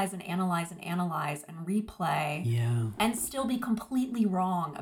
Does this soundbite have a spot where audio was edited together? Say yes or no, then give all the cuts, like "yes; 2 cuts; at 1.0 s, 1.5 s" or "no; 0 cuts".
no; 0 cuts